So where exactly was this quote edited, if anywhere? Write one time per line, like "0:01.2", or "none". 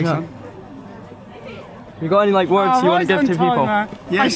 none